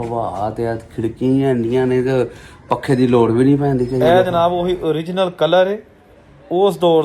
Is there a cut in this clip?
yes; 1 cut; at 4.0 s

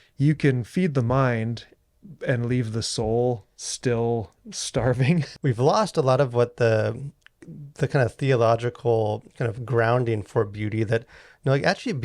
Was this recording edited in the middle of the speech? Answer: yes; 1 cut; at 5.3 s

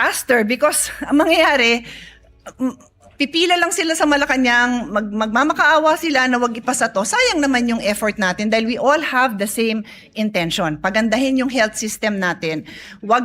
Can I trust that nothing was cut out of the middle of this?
yes; 0 cuts

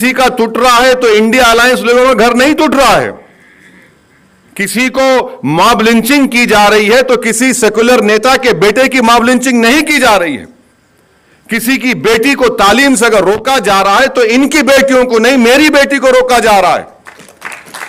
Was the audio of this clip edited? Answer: no; 0 cuts

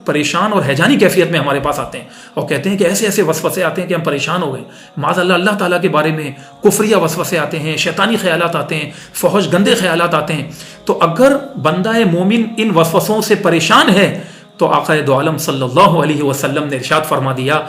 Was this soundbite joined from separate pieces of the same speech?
no; 0 cuts

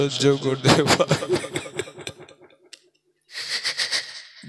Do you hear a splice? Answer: yes; 1 cut; at 3.4 s

